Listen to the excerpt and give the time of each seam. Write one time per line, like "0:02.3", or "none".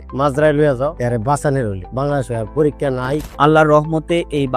0:01.0
0:03.3

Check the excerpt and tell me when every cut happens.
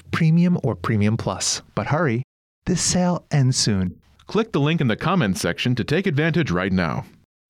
none

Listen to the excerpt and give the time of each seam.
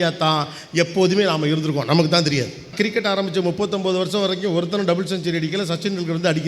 0:02.7

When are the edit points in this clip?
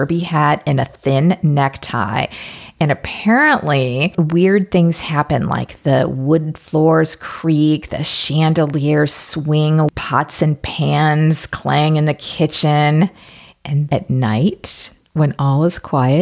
0:10.0
0:13.9

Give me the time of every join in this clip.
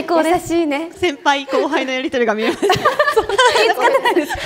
0:00.9
0:03.5

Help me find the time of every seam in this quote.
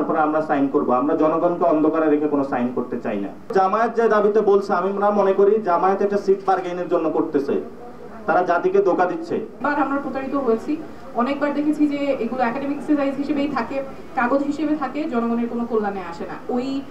0:03.4
0:09.6

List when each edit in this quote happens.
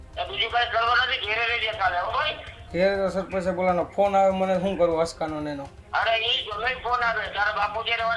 0:02.5

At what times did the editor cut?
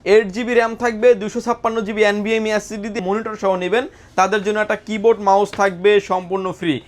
0:03.0

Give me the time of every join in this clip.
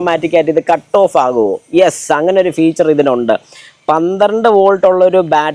none

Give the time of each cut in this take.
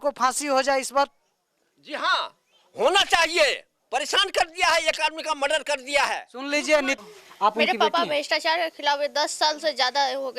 0:07.0

